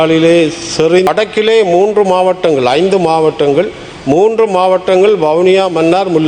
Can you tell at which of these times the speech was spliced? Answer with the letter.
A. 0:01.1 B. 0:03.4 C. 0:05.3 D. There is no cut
A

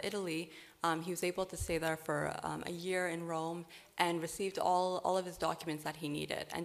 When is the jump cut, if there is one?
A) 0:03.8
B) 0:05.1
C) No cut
B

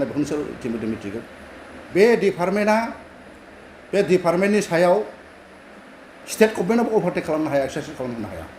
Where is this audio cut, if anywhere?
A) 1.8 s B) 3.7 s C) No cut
A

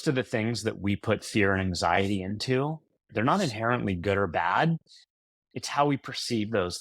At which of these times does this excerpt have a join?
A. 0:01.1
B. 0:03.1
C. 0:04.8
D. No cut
B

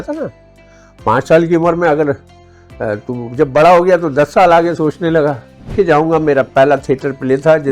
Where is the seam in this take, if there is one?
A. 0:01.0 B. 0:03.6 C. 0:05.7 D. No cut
C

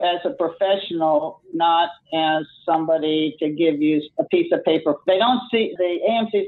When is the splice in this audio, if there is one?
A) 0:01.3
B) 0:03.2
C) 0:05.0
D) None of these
C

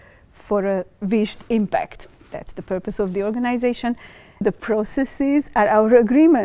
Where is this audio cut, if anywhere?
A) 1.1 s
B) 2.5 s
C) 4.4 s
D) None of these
C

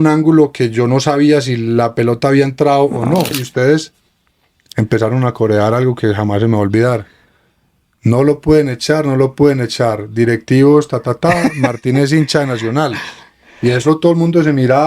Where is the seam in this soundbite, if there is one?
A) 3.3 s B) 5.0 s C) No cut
A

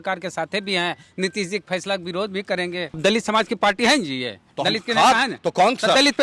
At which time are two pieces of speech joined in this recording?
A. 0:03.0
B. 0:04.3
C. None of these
A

